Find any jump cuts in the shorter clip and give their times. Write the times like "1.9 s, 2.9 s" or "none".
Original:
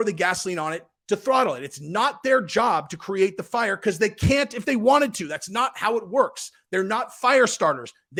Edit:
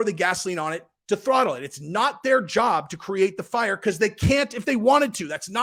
none